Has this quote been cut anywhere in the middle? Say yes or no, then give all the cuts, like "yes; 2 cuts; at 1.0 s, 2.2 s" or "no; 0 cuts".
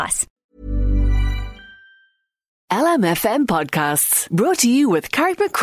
yes; 1 cut; at 2.5 s